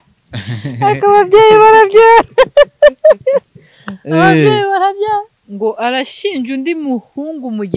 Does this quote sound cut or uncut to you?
cut